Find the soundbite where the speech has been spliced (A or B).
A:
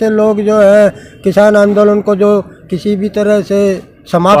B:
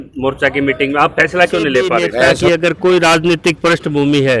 B